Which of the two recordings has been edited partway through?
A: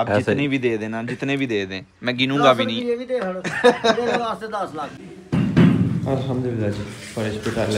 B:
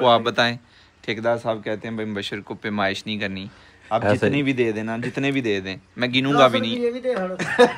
A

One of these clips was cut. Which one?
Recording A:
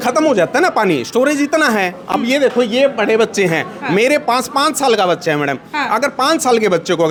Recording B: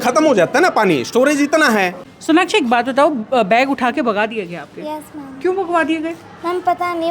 B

